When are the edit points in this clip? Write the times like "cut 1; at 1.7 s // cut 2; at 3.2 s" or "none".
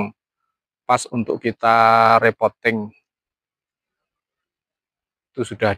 none